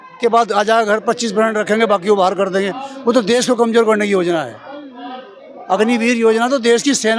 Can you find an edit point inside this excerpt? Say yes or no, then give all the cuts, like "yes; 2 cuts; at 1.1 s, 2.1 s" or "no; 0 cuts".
no; 0 cuts